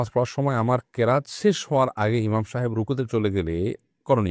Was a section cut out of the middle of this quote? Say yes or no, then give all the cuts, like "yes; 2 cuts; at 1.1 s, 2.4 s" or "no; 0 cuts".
no; 0 cuts